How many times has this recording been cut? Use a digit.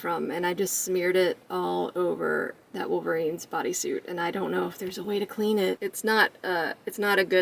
1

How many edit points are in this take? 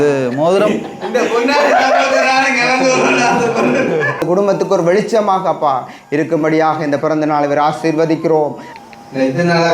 2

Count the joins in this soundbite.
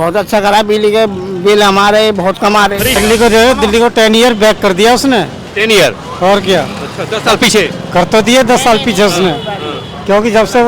1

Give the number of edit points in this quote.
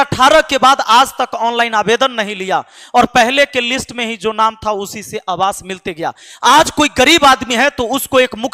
0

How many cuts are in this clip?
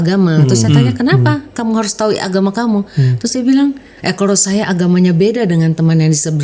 1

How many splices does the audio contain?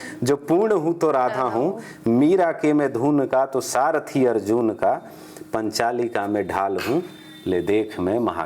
0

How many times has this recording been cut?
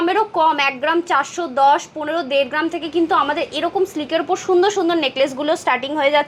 0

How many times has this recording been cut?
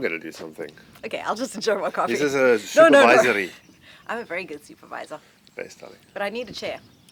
0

